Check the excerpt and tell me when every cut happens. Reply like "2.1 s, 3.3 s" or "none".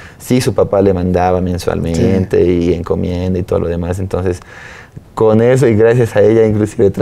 none